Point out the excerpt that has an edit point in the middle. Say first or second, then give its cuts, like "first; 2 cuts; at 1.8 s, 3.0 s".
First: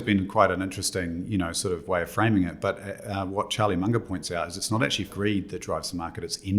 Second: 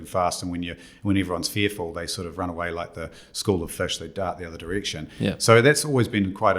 first; 1 cut; at 5.1 s